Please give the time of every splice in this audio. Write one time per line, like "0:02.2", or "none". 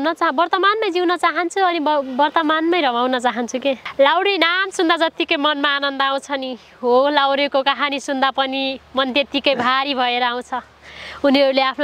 0:03.9